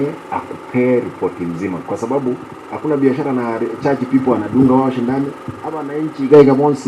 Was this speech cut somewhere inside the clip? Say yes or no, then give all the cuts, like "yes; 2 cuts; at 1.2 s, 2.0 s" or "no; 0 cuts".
no; 0 cuts